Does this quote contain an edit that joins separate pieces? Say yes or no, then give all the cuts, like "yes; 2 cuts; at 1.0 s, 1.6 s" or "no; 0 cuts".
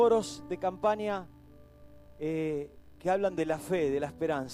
yes; 1 cut; at 1.0 s